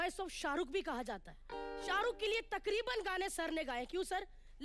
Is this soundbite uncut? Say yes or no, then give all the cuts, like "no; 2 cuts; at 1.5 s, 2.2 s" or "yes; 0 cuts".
yes; 0 cuts